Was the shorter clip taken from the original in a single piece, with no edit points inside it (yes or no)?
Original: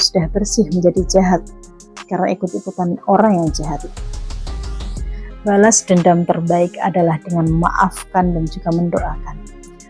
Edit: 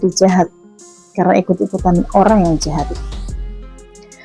yes